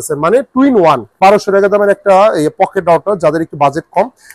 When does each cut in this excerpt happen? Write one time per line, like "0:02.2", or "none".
0:01.1